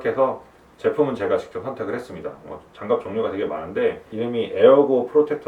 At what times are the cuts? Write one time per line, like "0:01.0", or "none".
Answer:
0:04.1